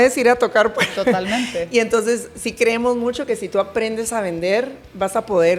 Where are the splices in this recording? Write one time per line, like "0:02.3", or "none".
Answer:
none